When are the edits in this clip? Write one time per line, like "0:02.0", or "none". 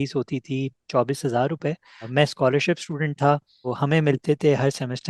0:02.1
0:03.7